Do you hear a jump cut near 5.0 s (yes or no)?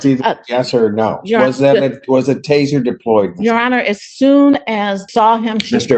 yes